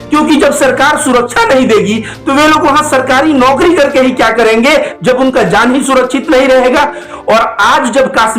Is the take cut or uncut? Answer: cut